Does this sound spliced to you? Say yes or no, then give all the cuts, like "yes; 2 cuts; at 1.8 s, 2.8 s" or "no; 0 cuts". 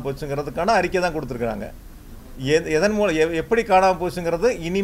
no; 0 cuts